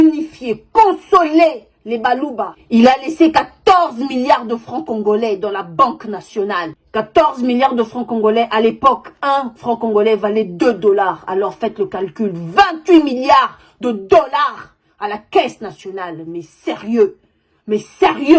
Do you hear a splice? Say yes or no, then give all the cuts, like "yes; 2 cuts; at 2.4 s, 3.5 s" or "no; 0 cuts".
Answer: yes; 1 cut; at 2.6 s